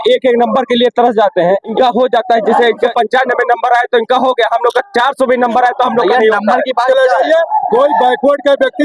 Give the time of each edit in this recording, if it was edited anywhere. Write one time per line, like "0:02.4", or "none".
0:01.7
0:02.9
0:06.8